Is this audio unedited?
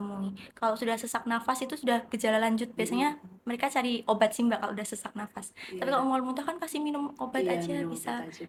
yes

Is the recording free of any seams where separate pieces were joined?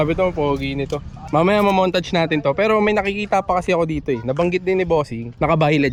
yes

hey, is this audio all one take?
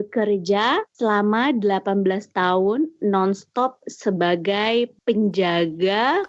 no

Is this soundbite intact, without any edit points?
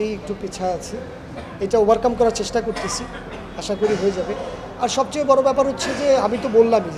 yes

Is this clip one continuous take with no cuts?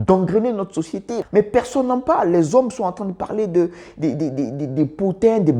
no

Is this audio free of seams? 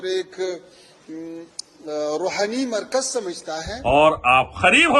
no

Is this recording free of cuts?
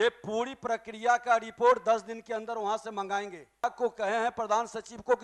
no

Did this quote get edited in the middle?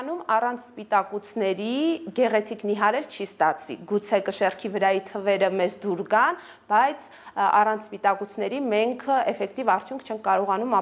no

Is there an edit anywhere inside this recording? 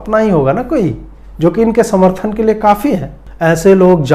no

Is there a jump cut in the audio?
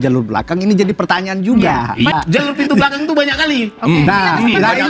yes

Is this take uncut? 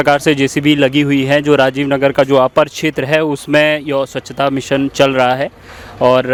yes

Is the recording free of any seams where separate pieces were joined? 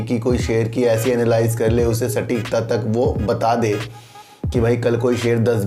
yes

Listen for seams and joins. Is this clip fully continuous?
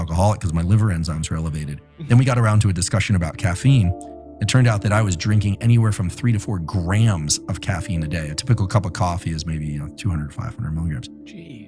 yes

